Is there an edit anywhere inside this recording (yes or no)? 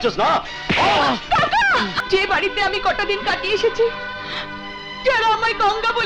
yes